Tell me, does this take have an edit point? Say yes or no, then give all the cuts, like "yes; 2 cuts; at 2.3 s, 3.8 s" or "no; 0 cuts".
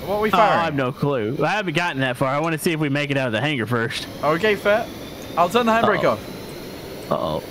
no; 0 cuts